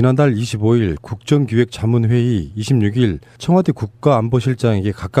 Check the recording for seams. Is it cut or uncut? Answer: uncut